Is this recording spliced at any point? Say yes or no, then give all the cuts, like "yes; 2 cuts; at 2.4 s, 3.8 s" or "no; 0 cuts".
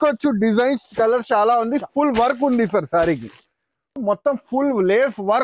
yes; 1 cut; at 3.9 s